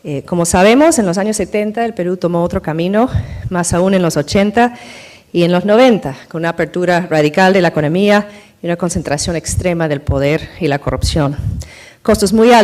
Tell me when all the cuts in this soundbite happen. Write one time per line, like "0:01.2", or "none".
0:11.1